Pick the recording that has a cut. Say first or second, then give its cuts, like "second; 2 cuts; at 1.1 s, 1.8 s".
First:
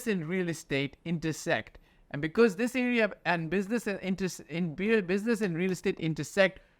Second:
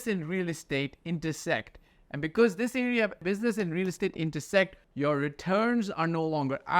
second; 2 cuts; at 3.2 s, 4.8 s